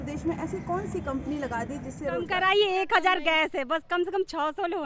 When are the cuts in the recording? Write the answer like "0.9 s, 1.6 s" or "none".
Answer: 2.2 s